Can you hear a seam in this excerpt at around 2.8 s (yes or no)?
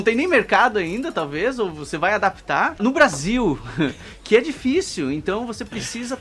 yes